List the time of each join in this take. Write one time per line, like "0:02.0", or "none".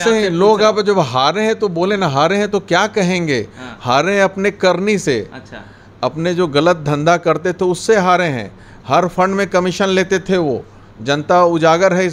none